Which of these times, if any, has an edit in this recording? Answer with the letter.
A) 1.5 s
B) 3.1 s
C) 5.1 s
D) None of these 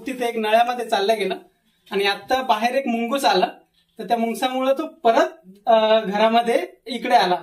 D